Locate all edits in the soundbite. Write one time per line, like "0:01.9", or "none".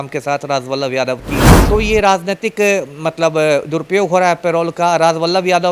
0:01.5